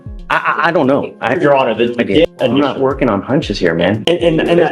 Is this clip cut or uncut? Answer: cut